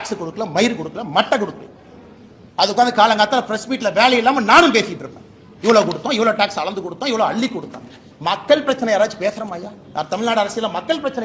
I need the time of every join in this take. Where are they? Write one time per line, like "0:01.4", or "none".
none